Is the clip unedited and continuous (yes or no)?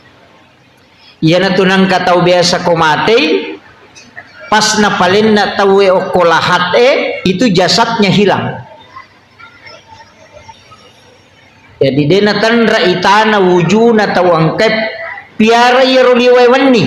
yes